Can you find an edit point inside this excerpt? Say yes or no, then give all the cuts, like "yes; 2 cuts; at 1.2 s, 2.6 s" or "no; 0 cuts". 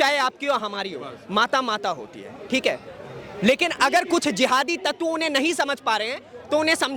no; 0 cuts